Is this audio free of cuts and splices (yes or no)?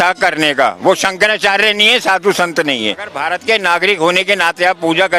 no